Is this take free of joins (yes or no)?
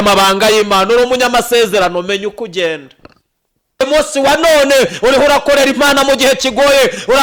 no